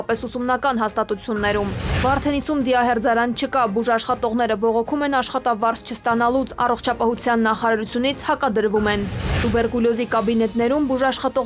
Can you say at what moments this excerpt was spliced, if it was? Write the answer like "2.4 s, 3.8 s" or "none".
none